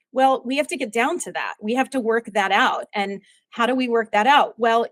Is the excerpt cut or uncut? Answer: uncut